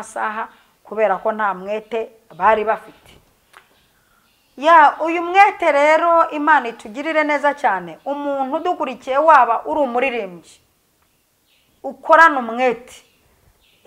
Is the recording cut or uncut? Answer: uncut